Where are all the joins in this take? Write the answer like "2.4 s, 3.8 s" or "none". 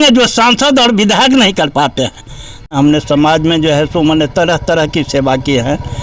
2.7 s

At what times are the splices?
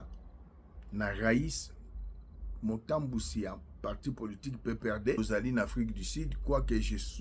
5.2 s

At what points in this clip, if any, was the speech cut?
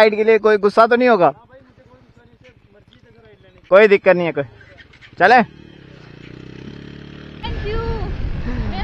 7.4 s

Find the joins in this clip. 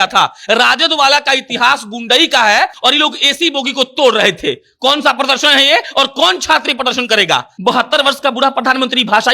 2.8 s, 7.5 s

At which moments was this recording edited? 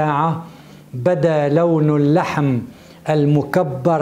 none

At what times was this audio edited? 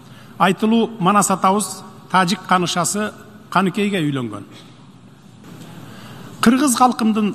5.4 s

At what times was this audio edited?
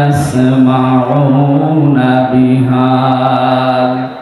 none

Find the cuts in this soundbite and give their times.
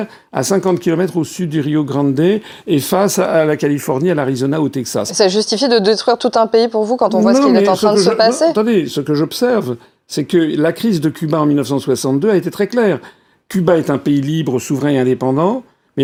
none

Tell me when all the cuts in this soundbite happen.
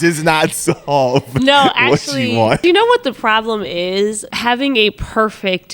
2.6 s, 4.2 s

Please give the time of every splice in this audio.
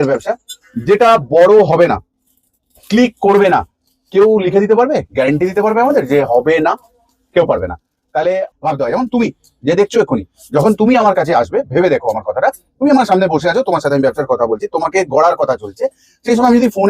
8.5 s

